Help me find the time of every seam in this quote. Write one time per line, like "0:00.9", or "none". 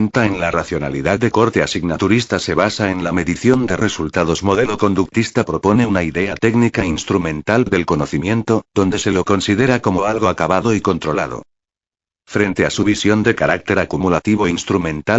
0:01.0